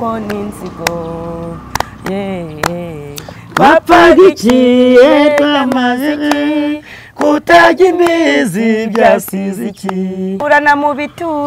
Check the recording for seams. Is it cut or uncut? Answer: cut